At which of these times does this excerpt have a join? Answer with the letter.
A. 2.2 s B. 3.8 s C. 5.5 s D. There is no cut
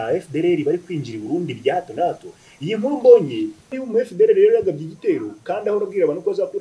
B